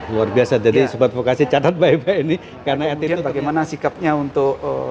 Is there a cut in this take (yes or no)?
yes